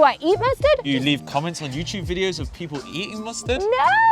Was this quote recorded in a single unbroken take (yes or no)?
no